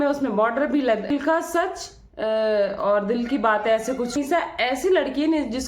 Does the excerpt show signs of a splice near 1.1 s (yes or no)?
yes